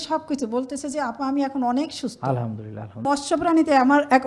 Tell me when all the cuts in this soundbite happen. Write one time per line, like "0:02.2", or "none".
0:03.1